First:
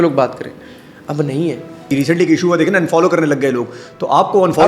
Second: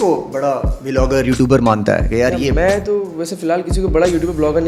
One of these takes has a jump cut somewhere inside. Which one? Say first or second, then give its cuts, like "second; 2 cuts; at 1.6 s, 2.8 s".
first; 1 cut; at 1.9 s